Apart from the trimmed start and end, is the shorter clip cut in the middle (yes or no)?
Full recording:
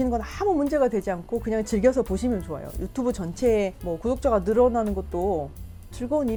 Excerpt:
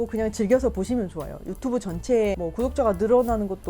yes